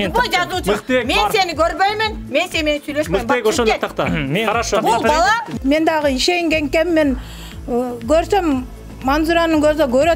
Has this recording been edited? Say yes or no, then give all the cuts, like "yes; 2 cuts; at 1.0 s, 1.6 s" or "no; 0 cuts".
yes; 1 cut; at 5.5 s